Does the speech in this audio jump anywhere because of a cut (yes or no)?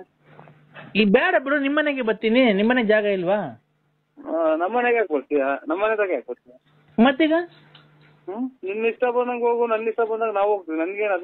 no